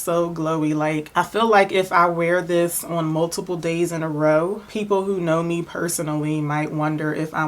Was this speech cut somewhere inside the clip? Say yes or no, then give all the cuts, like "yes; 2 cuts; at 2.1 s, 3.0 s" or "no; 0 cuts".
yes; 1 cut; at 1.1 s